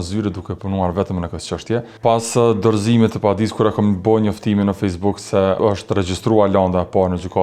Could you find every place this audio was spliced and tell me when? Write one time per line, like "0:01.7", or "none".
0:01.9
0:05.6